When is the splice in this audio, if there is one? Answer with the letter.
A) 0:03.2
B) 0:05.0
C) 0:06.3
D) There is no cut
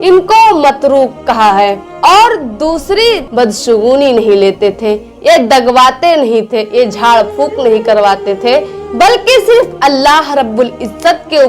A